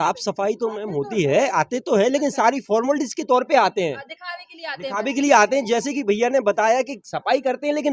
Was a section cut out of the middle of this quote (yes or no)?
no